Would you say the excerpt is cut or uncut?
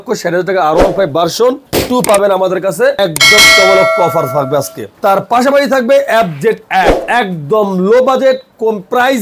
uncut